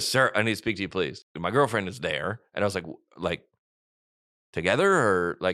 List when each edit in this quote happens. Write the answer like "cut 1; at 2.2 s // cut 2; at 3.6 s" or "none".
cut 1; at 1.2 s